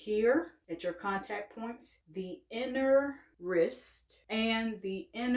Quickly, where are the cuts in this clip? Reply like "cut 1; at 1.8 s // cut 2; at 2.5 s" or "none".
none